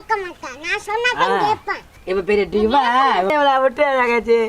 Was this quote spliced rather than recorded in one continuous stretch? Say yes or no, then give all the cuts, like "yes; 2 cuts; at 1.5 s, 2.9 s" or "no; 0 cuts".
no; 0 cuts